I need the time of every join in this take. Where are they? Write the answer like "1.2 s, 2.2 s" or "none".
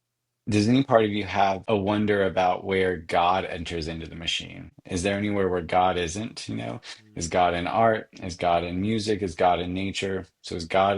1.6 s, 4.8 s